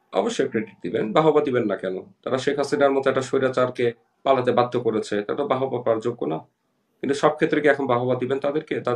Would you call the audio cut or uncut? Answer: uncut